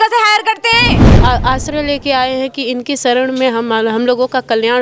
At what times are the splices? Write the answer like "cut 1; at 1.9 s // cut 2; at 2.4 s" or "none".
cut 1; at 1.1 s